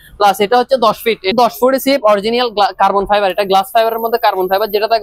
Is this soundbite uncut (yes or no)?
no